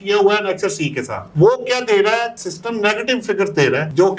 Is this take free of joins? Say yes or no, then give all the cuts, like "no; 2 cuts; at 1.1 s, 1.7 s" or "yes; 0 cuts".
yes; 0 cuts